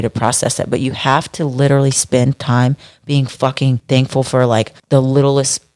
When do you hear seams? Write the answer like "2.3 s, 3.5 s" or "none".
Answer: 3.8 s, 4.8 s